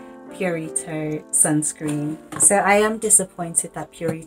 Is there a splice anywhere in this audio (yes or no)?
yes